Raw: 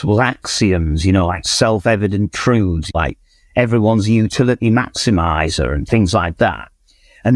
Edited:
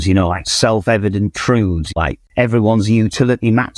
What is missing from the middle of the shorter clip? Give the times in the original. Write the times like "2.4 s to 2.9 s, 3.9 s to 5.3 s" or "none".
3.2 s to 3.4 s